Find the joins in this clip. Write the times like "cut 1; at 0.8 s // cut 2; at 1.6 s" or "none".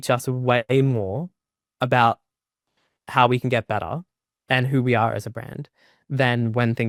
none